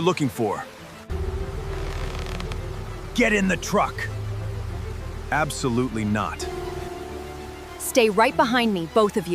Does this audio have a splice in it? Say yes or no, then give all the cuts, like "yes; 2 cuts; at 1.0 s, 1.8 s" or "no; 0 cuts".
yes; 2 cuts; at 1.1 s, 6.4 s